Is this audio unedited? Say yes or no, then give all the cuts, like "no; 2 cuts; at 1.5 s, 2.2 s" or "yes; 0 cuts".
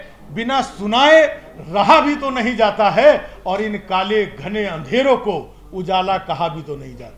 yes; 0 cuts